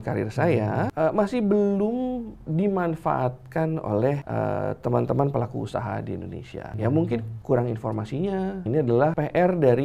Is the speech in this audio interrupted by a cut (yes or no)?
yes